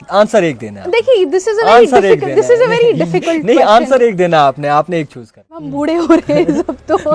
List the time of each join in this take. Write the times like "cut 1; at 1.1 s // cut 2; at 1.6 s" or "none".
cut 1; at 5.7 s